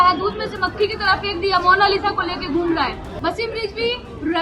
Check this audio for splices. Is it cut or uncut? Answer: cut